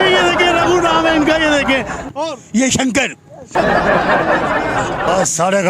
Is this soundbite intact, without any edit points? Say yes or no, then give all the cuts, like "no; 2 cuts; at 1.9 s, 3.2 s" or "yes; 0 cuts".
no; 2 cuts; at 3.5 s, 4.6 s